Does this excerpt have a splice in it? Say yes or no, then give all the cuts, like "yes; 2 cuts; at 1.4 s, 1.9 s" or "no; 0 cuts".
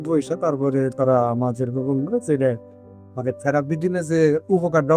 no; 0 cuts